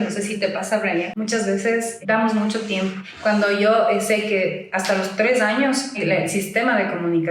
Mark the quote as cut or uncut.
cut